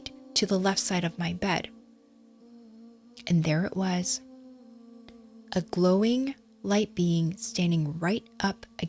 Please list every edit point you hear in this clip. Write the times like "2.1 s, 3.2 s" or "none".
none